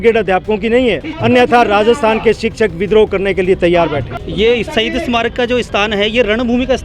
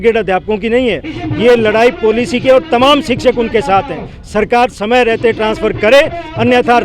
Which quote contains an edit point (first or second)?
first